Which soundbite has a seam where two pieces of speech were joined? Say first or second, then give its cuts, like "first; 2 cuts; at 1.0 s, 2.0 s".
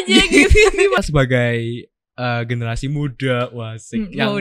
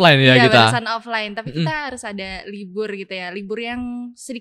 first; 1 cut; at 1.0 s